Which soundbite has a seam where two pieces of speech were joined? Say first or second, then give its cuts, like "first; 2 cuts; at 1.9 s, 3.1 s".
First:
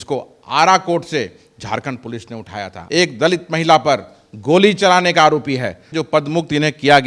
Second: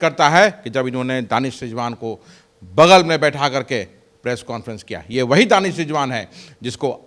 first; 2 cuts; at 2.7 s, 5.9 s